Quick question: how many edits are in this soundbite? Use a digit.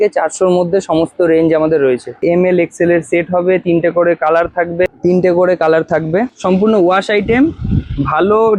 3